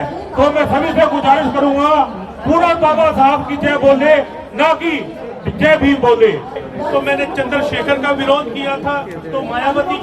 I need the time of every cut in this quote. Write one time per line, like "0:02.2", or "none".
0:06.7